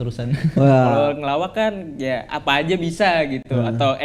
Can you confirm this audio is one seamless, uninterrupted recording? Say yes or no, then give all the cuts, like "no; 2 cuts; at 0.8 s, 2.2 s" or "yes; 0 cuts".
no; 1 cut; at 0.9 s